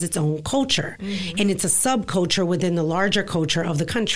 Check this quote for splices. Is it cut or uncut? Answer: uncut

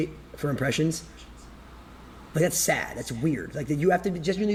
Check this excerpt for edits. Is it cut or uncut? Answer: uncut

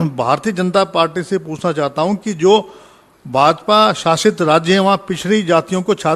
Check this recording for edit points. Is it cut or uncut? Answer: uncut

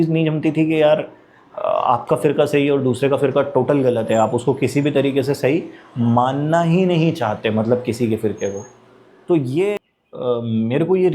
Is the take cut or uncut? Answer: cut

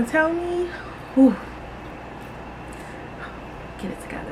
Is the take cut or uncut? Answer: uncut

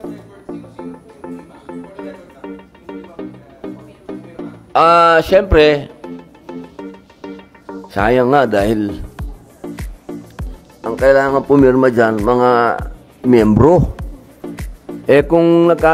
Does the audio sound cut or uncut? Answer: uncut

